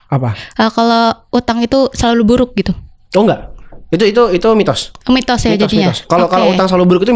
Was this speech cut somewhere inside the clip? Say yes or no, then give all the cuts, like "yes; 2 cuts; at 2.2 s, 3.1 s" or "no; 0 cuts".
no; 0 cuts